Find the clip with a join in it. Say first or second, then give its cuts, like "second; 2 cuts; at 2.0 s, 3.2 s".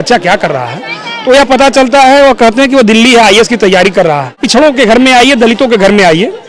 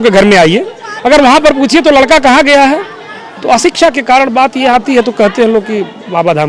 first; 1 cut; at 4.4 s